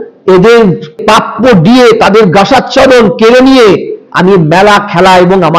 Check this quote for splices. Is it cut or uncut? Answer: cut